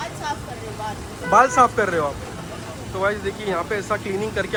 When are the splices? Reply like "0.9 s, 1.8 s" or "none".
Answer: none